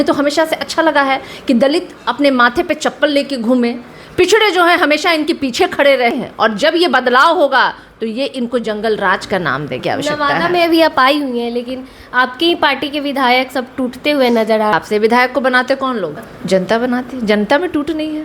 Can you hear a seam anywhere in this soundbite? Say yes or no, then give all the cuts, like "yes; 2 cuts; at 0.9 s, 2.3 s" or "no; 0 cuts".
yes; 4 cuts; at 6.1 s, 9.8 s, 14.7 s, 16.3 s